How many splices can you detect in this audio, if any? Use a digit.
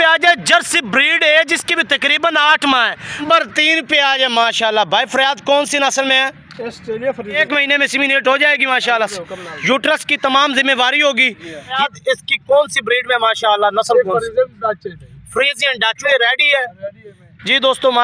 4